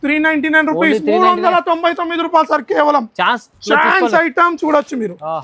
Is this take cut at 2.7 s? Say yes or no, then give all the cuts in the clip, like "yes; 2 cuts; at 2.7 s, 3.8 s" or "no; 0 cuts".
no; 0 cuts